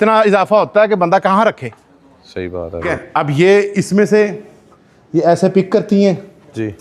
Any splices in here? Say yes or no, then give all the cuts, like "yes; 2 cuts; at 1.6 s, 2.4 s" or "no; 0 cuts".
yes; 1 cut; at 2.9 s